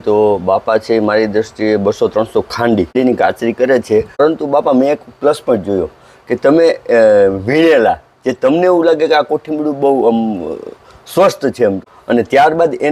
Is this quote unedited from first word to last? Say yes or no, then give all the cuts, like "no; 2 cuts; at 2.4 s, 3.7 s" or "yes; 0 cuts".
no; 3 cuts; at 2.9 s, 4.2 s, 11.8 s